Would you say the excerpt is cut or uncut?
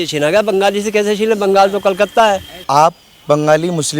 cut